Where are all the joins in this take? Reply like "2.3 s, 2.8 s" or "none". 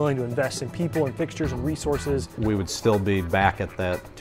2.3 s

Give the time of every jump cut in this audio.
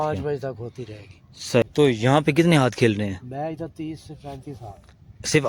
1.6 s

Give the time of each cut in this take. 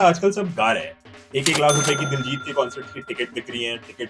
none

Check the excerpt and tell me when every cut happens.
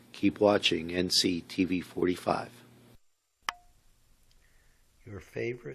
2.9 s

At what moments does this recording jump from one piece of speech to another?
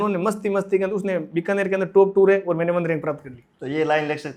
none

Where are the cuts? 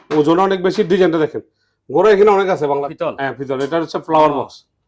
2.9 s

